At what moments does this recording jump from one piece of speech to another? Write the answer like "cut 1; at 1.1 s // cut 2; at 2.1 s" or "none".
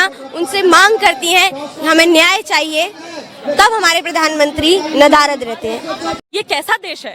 cut 1; at 6.2 s